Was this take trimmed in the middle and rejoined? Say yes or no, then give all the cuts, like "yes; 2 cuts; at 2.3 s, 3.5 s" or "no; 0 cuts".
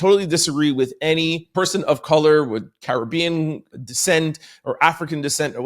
yes; 2 cuts; at 1.5 s, 3.7 s